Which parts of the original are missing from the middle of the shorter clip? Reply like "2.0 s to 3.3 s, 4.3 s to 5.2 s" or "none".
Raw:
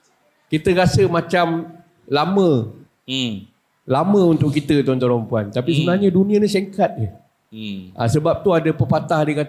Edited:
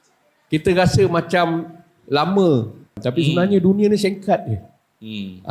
3.0 s to 5.5 s